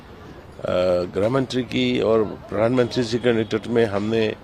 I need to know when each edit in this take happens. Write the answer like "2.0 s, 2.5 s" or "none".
none